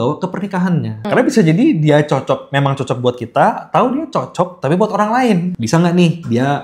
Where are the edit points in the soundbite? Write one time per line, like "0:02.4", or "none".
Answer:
0:01.0
0:05.5